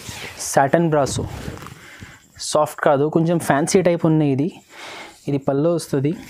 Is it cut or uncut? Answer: uncut